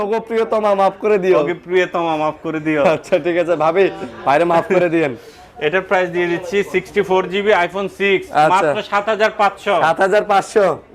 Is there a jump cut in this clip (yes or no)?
no